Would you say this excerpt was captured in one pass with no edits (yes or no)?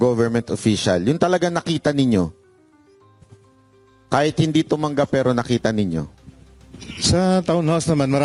yes